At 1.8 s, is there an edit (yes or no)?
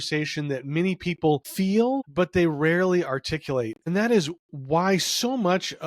yes